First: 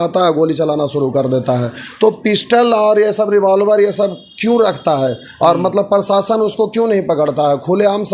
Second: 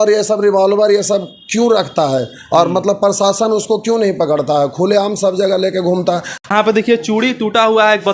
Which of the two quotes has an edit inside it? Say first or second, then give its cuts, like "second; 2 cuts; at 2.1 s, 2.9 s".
second; 1 cut; at 6.5 s